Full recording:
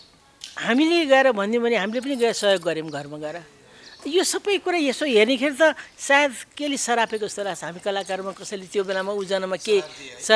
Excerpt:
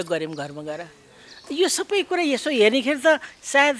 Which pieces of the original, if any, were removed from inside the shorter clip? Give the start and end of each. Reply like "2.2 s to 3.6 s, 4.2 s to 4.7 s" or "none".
none

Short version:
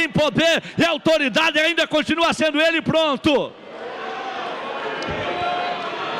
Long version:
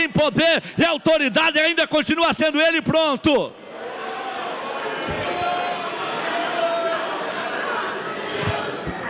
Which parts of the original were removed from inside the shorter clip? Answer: none

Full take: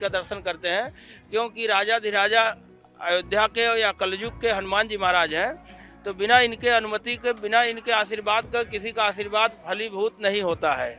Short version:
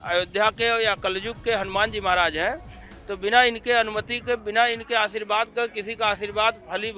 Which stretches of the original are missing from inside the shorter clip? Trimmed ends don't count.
none

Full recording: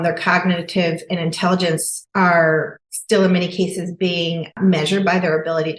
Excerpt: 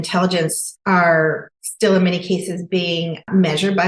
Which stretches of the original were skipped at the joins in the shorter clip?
none

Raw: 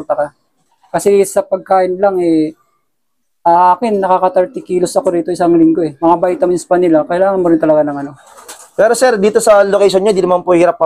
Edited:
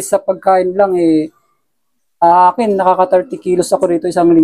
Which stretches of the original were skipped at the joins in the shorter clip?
none

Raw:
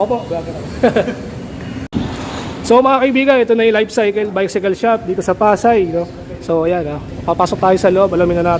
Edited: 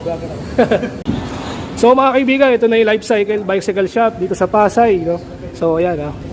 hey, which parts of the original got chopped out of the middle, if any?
1.2 s to 1.8 s

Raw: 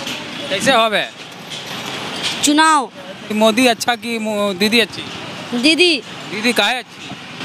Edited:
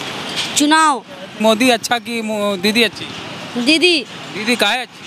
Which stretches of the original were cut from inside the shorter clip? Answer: 3.1 s to 3.2 s

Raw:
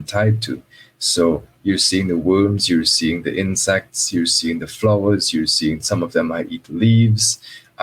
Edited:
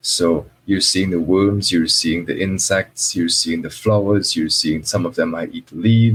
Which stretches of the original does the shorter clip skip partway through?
none

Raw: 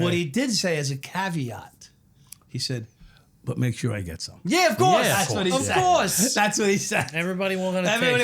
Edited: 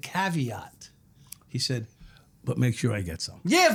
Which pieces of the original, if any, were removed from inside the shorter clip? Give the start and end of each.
none

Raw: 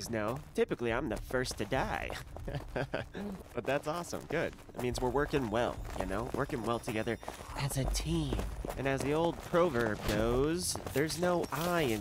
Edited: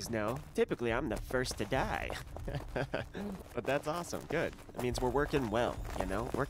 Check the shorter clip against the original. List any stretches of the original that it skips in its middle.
none

